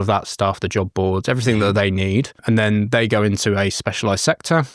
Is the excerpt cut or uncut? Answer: cut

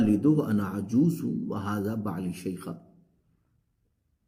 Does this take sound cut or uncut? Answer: uncut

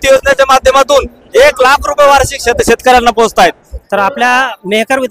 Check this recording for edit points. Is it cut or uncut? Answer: cut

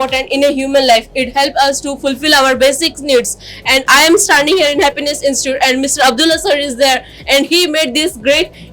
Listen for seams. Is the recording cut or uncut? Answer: uncut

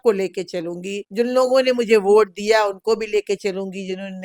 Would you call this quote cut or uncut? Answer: cut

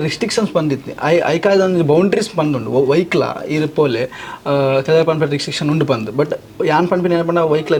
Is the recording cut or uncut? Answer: uncut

